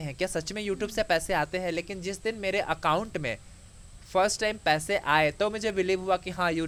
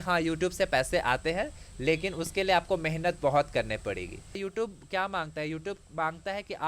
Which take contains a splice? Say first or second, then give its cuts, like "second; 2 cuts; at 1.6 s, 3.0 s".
second; 1 cut; at 4.4 s